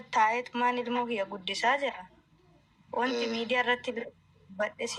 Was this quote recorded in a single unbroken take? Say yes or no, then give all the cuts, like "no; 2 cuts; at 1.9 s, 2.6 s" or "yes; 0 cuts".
yes; 0 cuts